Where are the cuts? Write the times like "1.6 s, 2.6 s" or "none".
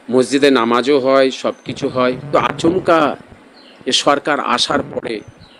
2.3 s